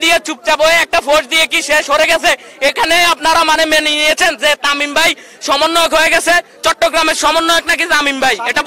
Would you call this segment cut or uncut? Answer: uncut